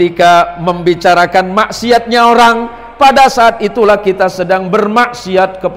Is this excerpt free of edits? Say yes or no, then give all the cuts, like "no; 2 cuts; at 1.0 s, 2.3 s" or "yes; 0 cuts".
yes; 0 cuts